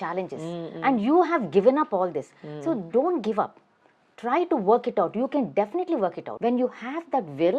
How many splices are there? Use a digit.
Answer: 1